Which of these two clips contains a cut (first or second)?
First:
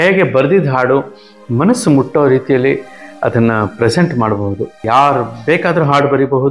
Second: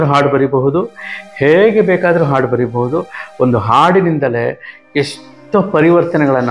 first